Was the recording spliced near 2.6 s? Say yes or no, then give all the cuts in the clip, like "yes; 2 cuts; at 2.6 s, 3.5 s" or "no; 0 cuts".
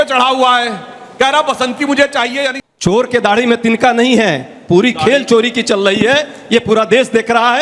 yes; 1 cut; at 2.6 s